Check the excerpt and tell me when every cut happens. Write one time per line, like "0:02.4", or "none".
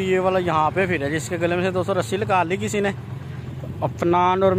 none